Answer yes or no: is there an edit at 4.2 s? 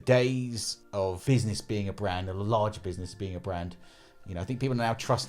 no